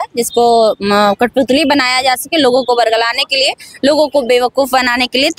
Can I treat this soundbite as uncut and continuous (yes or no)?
yes